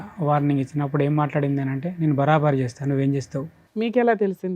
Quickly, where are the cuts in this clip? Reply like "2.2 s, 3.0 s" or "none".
3.6 s

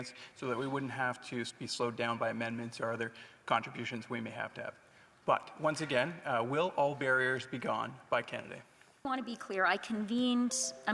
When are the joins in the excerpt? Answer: 9.1 s

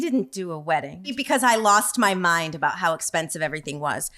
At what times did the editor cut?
1.2 s

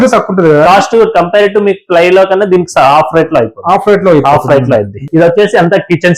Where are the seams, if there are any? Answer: 5.0 s

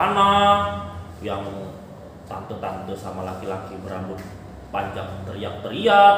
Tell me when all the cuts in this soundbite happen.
none

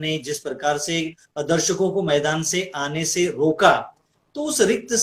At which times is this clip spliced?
none

